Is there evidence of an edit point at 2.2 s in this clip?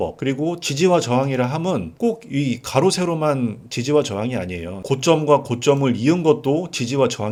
no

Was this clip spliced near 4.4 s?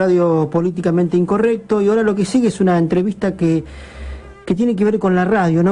yes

